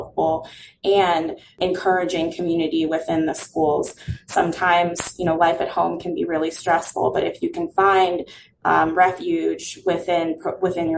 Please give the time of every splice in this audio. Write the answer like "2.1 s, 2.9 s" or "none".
1.5 s